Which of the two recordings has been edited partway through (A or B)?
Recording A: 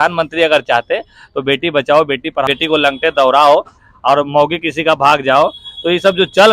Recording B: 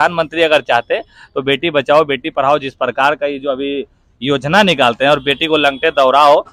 A